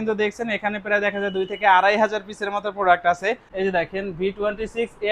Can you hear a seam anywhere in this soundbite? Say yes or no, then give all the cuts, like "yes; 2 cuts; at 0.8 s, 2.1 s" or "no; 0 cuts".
yes; 1 cut; at 3.5 s